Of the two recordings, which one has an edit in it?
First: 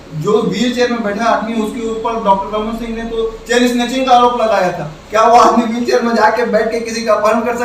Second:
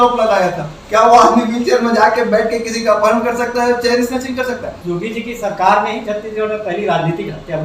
second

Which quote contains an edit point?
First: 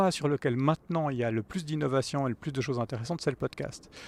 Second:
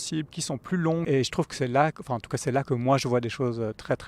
second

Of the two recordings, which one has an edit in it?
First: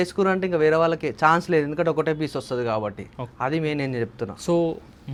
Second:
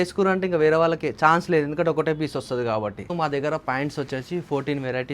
second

